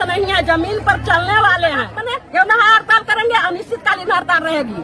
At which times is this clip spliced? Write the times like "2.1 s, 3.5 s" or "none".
2.0 s